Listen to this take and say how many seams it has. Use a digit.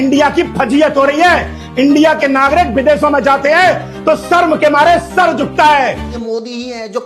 1